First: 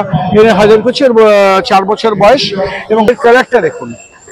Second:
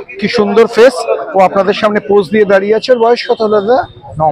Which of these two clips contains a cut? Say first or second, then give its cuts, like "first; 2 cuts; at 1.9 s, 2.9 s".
first; 1 cut; at 3.1 s